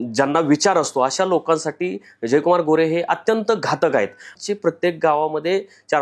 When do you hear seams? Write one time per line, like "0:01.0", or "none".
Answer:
0:04.3